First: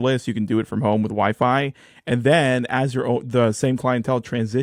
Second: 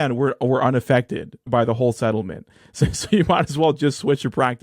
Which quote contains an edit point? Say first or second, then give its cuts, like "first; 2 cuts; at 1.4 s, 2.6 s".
second; 1 cut; at 1.5 s